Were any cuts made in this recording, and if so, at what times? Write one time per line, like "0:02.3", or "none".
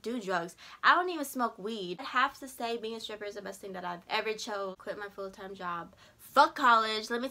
0:02.0
0:04.8